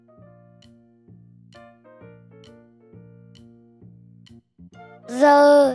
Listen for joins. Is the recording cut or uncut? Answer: uncut